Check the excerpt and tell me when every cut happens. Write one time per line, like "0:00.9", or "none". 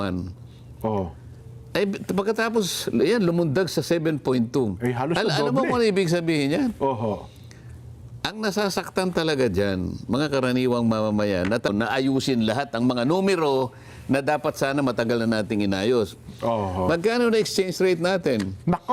0:11.7